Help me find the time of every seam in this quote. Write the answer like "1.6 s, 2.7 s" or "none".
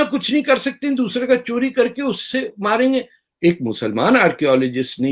3.2 s

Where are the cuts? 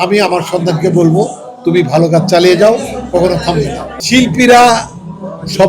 none

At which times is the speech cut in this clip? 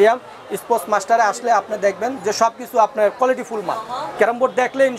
none

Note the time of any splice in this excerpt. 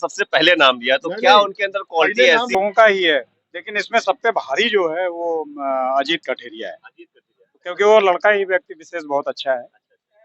2.5 s

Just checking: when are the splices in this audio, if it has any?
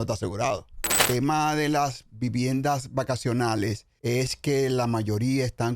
0.9 s, 3.9 s

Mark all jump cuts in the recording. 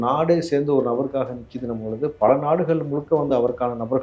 none

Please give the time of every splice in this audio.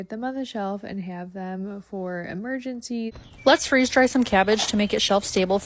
3.2 s

